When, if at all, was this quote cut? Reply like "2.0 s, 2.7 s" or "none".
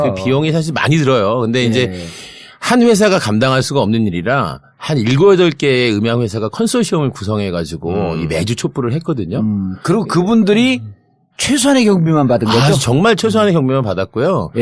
none